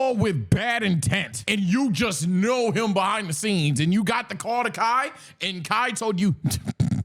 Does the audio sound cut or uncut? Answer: cut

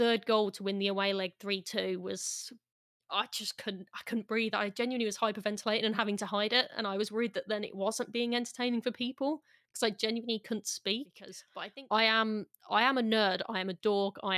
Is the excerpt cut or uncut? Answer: cut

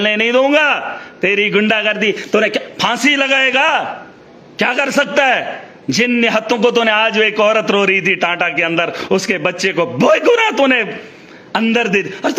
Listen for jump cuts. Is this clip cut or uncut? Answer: uncut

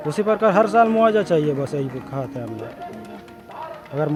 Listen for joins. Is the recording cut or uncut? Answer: uncut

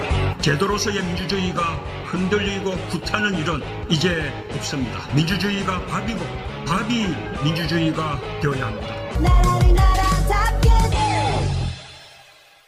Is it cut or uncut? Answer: uncut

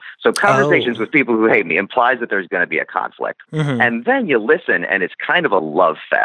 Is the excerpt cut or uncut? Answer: cut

